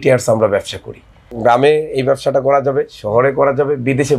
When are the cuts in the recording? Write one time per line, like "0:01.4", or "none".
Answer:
0:01.3